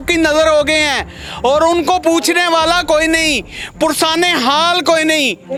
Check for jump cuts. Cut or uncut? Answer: uncut